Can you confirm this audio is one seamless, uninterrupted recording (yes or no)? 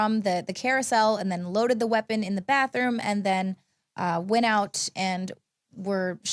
yes